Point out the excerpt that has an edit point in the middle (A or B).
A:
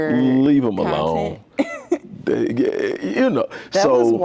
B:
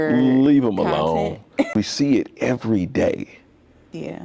B